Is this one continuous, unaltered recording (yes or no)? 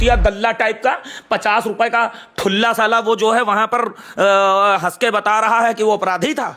yes